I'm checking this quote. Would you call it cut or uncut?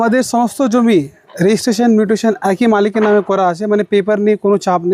uncut